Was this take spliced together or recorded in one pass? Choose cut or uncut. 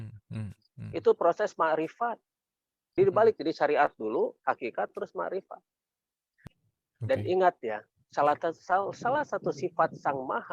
cut